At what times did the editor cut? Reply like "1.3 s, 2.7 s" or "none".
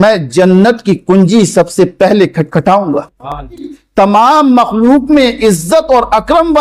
3.8 s